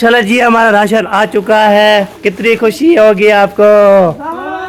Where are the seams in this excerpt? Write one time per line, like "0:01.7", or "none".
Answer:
none